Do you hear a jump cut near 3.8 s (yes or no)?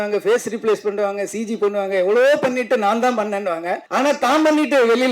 yes